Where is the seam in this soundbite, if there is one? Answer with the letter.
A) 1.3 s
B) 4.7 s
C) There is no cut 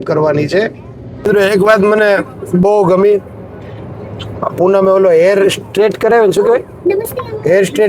A